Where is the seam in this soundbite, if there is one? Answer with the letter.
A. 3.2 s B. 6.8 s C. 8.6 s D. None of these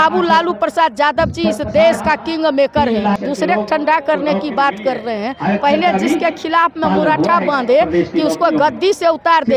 A